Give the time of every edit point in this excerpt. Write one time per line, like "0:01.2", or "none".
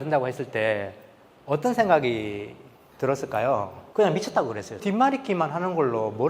0:03.8
0:04.8